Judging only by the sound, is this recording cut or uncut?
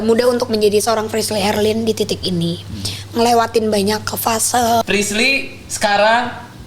cut